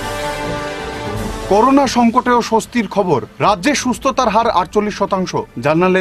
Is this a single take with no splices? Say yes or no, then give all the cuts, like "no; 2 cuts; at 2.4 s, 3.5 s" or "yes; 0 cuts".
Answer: yes; 0 cuts